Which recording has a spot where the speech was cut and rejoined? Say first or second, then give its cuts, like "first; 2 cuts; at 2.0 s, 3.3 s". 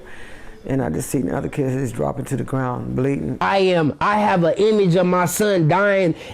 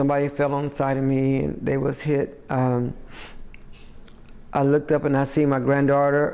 first; 1 cut; at 3.4 s